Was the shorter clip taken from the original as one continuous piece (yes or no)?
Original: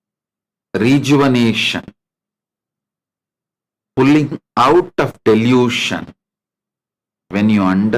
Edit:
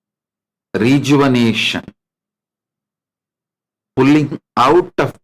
yes